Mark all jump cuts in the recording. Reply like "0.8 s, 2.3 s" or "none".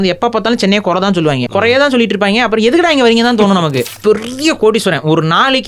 1.4 s, 3.9 s